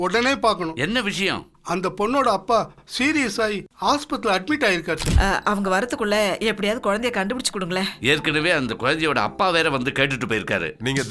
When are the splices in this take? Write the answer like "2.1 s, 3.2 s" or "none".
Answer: 5.1 s